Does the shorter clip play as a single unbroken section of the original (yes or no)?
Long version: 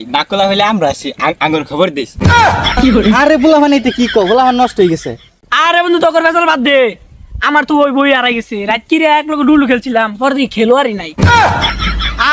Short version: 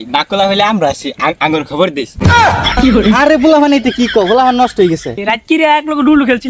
no